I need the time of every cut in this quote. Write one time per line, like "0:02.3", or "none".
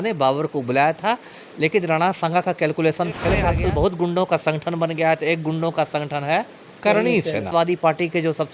0:03.4
0:07.5